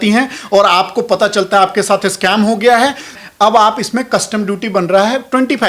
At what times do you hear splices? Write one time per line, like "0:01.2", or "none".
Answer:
0:03.2